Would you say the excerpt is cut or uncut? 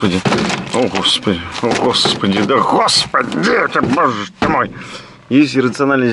uncut